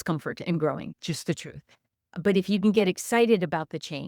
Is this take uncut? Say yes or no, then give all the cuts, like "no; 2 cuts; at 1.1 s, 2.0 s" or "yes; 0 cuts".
no; 1 cut; at 0.9 s